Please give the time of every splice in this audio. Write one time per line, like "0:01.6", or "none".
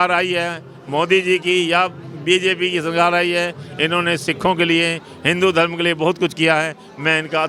none